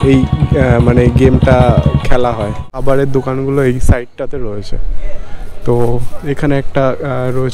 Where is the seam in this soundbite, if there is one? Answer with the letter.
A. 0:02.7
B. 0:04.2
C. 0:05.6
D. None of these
A